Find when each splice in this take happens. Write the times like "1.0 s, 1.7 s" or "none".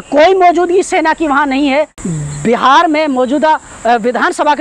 2.0 s